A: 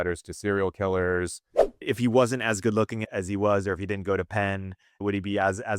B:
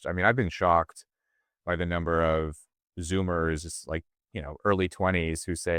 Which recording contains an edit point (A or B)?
A